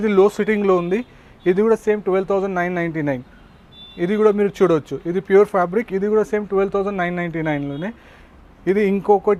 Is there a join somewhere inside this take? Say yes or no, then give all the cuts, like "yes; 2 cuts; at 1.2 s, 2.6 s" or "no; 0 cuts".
no; 0 cuts